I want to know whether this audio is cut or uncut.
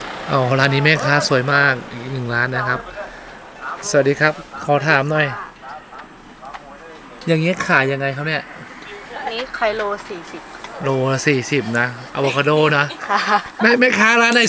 uncut